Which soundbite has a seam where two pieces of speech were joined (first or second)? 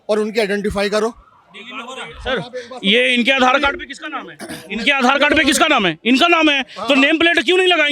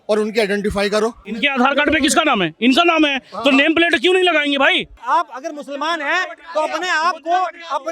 second